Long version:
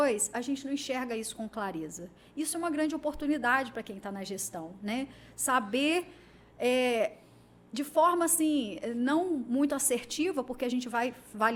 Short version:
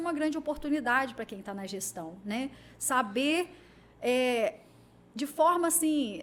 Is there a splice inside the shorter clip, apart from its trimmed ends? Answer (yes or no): no